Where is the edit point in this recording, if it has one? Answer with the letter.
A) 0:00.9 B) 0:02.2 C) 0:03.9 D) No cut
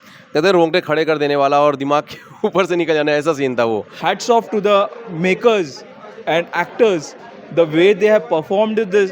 C